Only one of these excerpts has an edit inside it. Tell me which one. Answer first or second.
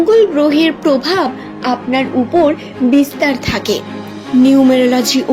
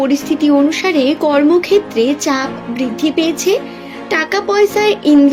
first